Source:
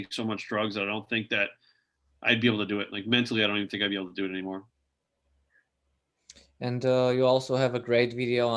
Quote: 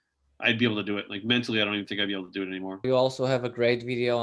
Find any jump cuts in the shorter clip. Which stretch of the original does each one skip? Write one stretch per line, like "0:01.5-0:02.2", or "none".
0:04.7-0:07.1